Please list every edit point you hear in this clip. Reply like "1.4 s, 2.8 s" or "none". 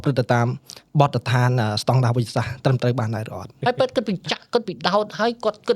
3.5 s